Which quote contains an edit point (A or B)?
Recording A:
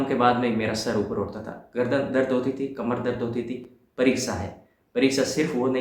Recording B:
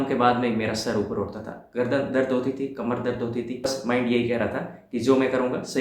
B